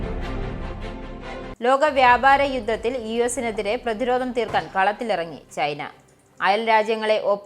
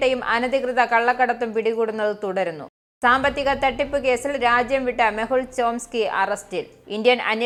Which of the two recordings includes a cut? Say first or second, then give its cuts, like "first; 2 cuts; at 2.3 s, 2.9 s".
first; 1 cut; at 1.5 s